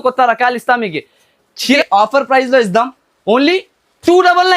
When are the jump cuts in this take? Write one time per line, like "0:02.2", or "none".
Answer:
0:01.8